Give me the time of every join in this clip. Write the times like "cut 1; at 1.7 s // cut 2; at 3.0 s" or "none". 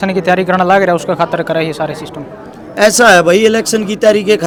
none